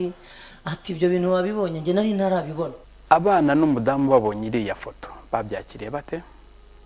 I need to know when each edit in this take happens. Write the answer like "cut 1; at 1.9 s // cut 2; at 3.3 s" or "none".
cut 1; at 2.8 s